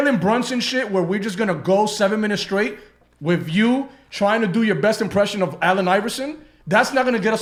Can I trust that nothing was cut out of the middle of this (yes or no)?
yes